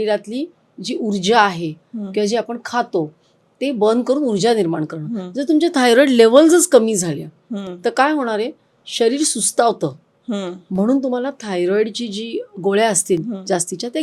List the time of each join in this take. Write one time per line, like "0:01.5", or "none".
none

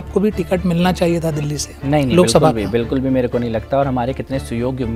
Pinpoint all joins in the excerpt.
none

